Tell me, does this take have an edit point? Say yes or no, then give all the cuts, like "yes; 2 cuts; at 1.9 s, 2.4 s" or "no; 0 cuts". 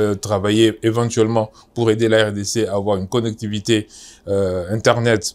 no; 0 cuts